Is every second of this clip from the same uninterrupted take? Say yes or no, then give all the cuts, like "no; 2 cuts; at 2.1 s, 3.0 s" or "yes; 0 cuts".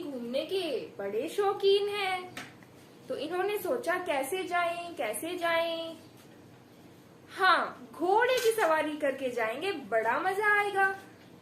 yes; 0 cuts